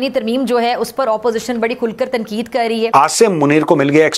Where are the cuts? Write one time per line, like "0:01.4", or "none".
0:02.9